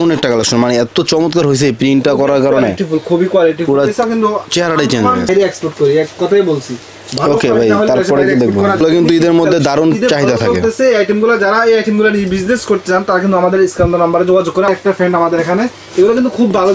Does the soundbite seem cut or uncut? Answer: cut